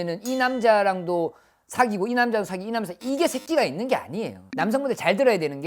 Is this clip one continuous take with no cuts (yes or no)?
no